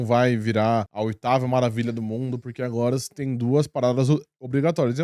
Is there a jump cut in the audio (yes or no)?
yes